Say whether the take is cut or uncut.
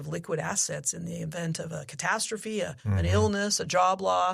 cut